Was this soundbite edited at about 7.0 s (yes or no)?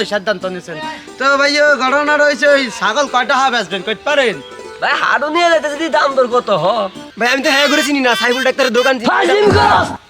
yes